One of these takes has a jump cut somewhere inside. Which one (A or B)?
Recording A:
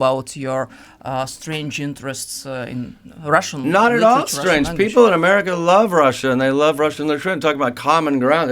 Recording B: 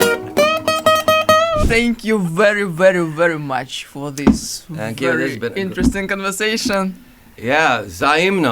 B